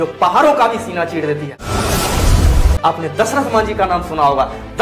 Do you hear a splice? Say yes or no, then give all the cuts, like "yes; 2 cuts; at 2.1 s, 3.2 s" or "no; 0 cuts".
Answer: yes; 2 cuts; at 1.6 s, 2.7 s